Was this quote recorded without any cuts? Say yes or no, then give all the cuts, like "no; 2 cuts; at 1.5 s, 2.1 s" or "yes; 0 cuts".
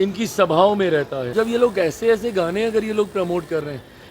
no; 1 cut; at 1.3 s